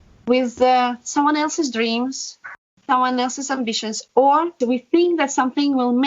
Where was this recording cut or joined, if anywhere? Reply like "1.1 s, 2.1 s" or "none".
2.6 s, 4.5 s